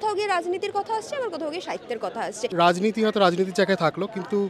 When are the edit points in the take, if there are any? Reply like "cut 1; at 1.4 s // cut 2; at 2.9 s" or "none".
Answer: cut 1; at 2.4 s

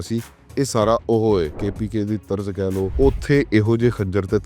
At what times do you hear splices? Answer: cut 1; at 1.6 s // cut 2; at 2.9 s

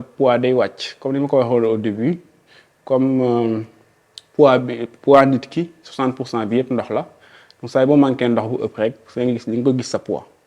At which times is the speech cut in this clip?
none

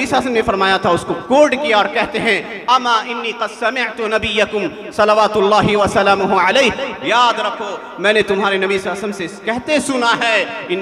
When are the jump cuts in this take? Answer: none

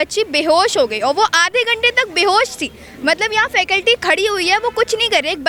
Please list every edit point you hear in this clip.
none

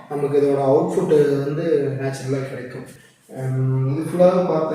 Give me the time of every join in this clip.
cut 1; at 2.8 s

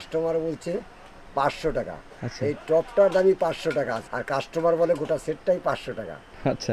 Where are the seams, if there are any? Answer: cut 1; at 4.1 s

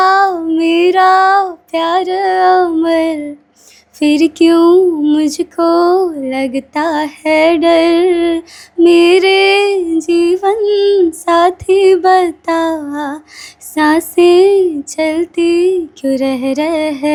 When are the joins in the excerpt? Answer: none

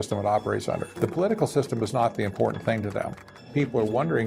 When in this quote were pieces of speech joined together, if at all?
cut 1; at 0.9 s // cut 2; at 3.3 s

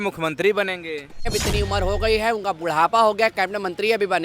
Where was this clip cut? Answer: cut 1; at 1.3 s

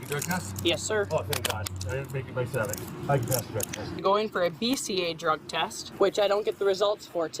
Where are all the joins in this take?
cut 1; at 2.8 s // cut 2; at 4.0 s // cut 3; at 5.8 s

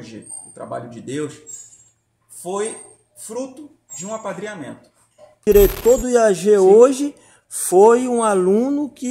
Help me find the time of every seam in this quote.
cut 1; at 5.4 s

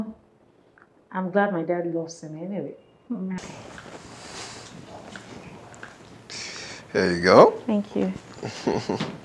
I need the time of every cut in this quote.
cut 1; at 3.4 s

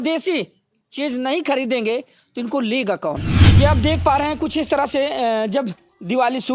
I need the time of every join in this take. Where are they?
cut 1; at 3.6 s

